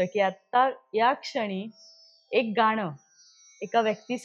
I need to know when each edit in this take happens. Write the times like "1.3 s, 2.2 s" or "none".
none